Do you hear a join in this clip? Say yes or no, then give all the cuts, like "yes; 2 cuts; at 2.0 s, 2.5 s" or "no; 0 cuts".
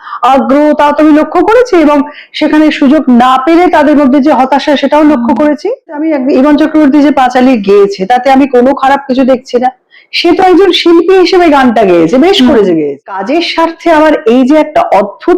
yes; 2 cuts; at 5.9 s, 13.1 s